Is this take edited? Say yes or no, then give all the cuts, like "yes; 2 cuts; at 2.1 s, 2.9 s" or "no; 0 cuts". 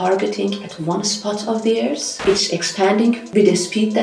yes; 2 cuts; at 2.1 s, 3.2 s